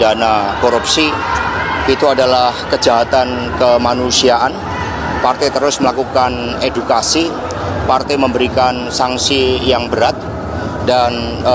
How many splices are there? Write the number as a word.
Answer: zero